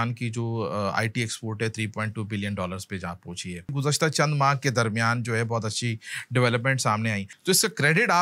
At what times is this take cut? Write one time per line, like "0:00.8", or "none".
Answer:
0:03.7
0:07.3